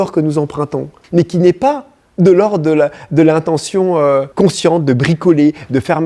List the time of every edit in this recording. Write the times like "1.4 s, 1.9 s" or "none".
0.9 s, 4.3 s